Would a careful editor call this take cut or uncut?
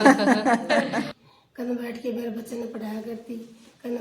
cut